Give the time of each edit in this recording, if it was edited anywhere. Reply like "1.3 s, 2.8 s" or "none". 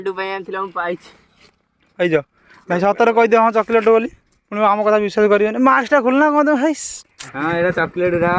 none